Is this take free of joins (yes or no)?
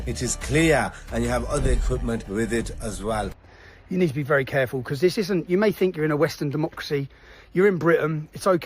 no